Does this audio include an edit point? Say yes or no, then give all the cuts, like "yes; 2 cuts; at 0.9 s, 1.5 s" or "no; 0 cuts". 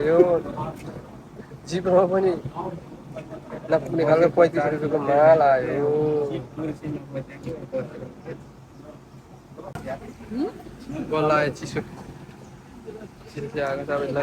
no; 0 cuts